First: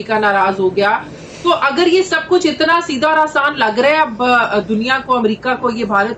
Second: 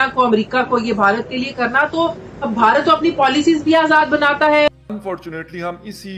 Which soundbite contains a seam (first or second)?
second